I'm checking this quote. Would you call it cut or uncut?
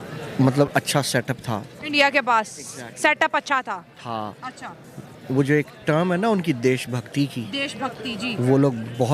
uncut